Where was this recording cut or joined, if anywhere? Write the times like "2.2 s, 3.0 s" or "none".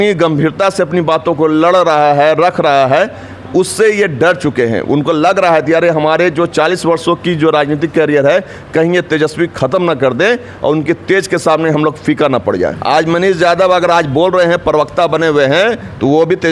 12.8 s

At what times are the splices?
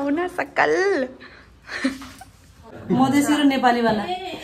2.7 s

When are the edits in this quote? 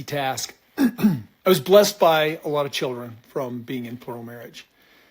1.3 s

